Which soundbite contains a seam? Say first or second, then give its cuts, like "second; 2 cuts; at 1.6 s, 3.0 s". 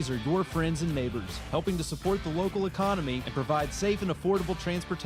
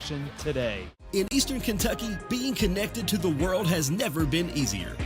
second; 1 cut; at 1.1 s